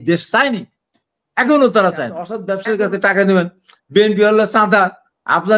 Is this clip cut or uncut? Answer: cut